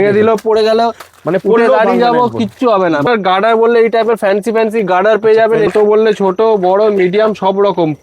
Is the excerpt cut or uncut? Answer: cut